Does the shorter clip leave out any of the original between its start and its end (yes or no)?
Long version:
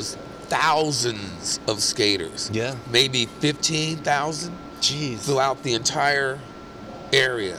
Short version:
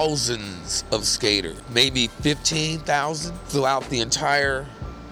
yes